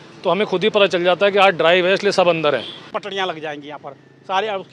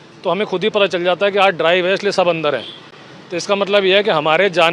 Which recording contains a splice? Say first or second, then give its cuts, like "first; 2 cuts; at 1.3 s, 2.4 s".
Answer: first; 1 cut; at 3.0 s